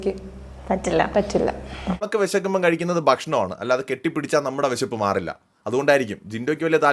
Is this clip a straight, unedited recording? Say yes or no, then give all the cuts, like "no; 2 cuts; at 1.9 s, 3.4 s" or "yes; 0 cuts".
no; 1 cut; at 2.0 s